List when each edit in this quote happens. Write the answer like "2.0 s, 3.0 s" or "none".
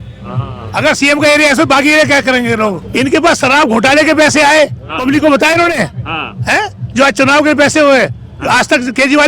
2.8 s